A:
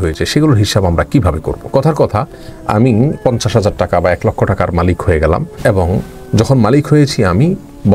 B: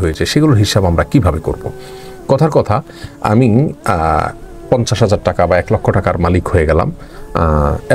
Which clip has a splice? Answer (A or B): A